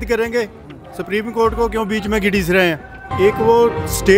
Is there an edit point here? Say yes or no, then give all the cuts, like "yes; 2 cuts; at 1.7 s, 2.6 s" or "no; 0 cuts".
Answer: no; 0 cuts